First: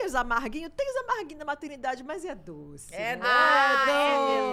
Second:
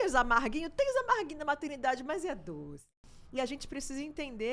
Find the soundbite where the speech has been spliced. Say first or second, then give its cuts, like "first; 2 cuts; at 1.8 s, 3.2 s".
second; 1 cut; at 2.8 s